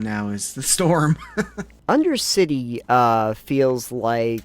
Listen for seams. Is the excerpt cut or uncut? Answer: cut